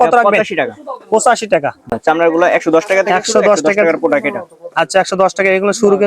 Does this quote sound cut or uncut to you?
cut